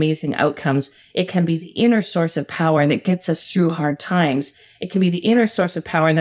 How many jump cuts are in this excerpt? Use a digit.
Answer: 0